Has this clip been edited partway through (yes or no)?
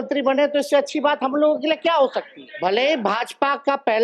yes